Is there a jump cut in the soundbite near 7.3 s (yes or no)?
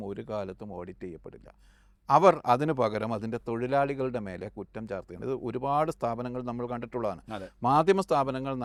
no